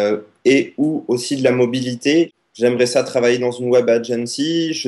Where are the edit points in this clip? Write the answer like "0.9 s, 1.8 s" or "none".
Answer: 2.3 s